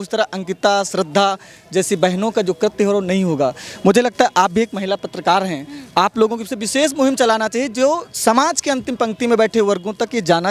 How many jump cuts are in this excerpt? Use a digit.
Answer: 0